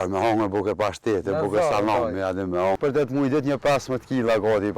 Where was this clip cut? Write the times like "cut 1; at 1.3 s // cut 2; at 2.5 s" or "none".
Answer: cut 1; at 2.8 s

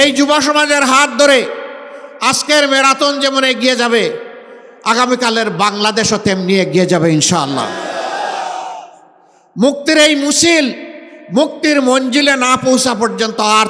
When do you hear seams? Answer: none

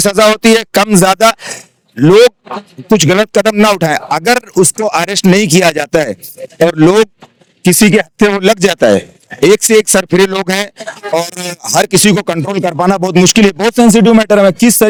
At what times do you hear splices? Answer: none

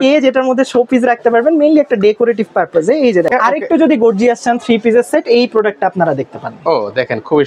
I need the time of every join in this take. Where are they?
cut 1; at 3.3 s

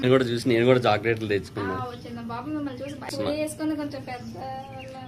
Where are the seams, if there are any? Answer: cut 1; at 3.1 s

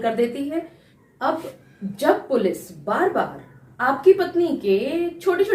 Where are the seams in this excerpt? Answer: cut 1; at 1.1 s

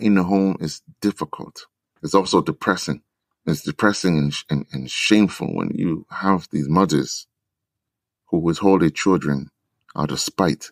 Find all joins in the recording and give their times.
cut 1; at 1.9 s

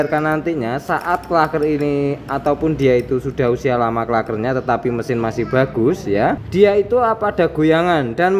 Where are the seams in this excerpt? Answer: cut 1; at 6.4 s

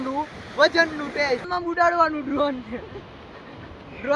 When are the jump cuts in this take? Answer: cut 1; at 1.5 s

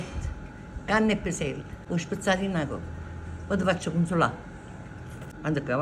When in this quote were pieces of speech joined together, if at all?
cut 1; at 1.7 s

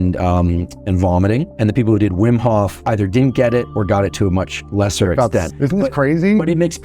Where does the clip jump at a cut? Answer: cut 1; at 5.5 s

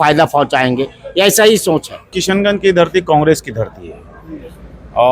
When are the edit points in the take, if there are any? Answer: cut 1; at 2.2 s

